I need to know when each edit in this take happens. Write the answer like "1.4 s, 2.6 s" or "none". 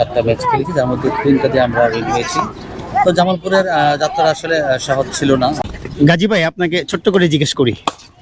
5.6 s